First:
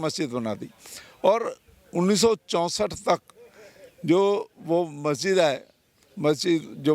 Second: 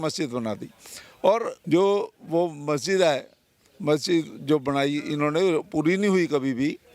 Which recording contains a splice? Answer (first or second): second